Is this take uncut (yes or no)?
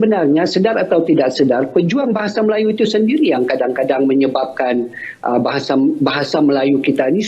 yes